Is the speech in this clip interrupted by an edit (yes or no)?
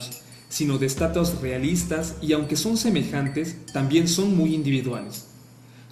yes